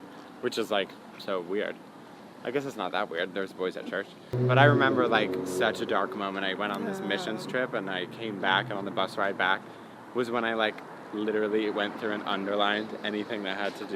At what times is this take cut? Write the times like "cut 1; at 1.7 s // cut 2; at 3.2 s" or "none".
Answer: cut 1; at 4.3 s